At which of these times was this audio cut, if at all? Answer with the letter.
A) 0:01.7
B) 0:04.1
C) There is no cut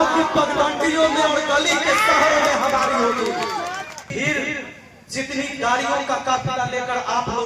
B